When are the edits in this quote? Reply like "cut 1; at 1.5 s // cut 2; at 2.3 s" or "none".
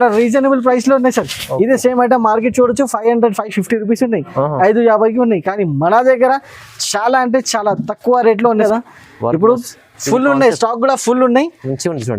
cut 1; at 8.6 s